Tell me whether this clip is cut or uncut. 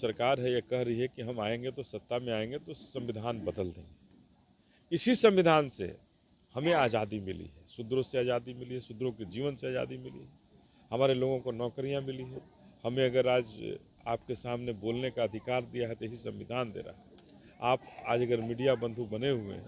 uncut